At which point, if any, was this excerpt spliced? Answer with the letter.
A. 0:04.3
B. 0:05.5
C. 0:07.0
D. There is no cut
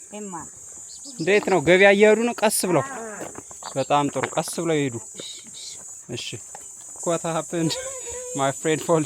C